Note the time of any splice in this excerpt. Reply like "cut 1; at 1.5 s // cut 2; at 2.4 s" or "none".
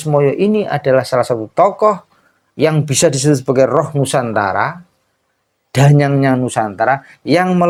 none